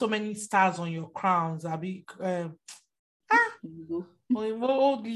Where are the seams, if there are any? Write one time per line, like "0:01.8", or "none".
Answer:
0:03.1